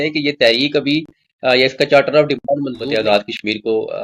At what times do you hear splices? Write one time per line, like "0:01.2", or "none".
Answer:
0:02.8

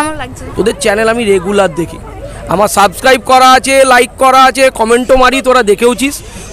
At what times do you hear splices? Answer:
none

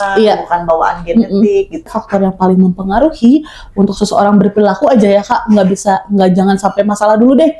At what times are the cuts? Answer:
0:01.9

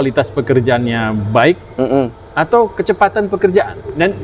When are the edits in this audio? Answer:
none

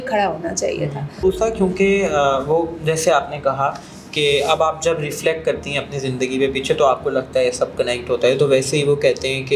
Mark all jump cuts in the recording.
0:01.2

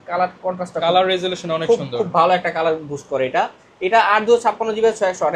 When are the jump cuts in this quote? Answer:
none

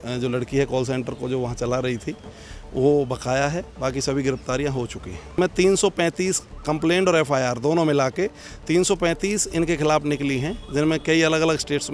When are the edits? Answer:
0:05.4

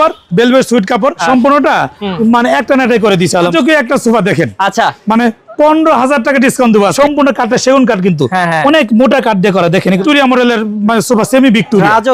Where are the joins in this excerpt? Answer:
0:01.2
0:03.5
0:07.0
0:10.0

